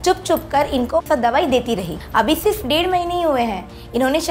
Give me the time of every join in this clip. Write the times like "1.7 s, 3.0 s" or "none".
1.1 s, 2.0 s